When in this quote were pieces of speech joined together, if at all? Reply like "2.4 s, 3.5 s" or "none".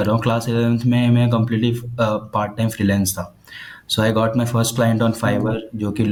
none